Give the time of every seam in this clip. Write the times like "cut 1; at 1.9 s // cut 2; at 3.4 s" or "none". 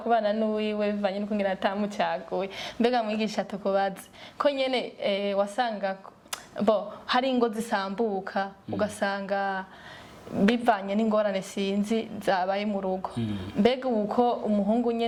none